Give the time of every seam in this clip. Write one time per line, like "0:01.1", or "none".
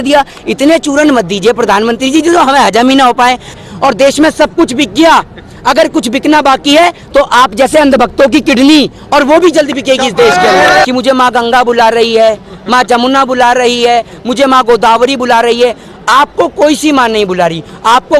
0:03.6
0:10.8